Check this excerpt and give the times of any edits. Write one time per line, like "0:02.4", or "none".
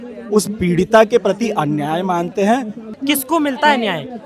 0:02.9